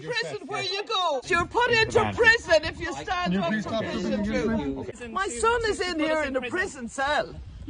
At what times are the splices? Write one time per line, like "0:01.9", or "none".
0:01.2
0:04.9